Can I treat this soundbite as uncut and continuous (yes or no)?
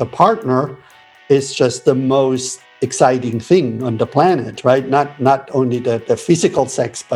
yes